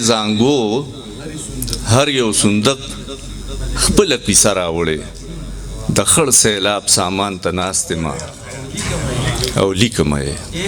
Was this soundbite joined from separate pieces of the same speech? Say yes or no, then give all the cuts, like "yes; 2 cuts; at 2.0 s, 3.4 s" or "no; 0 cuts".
no; 0 cuts